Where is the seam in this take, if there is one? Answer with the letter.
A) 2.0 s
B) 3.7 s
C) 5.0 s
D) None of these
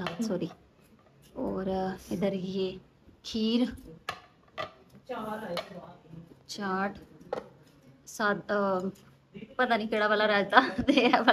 D